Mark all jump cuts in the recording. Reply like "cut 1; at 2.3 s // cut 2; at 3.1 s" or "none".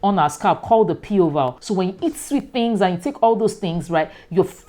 cut 1; at 1.6 s

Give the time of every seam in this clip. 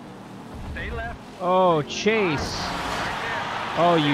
none

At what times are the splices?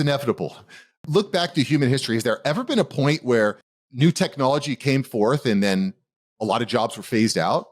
cut 1; at 1.0 s

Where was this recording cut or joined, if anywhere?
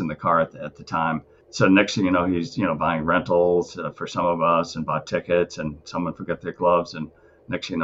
cut 1; at 1.4 s

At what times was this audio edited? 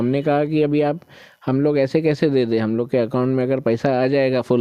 none

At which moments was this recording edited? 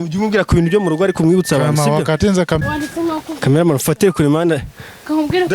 cut 1; at 2.6 s

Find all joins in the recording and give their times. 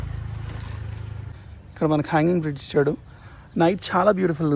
cut 1; at 1.3 s

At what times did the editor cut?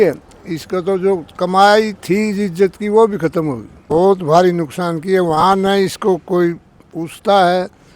cut 1; at 3.8 s

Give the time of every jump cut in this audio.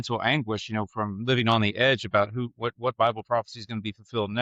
none

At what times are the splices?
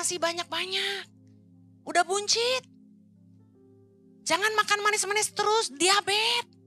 none

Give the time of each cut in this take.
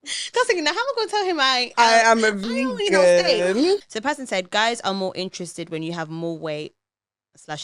cut 1; at 3.9 s

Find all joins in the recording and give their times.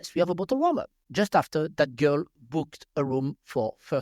cut 1; at 0.9 s

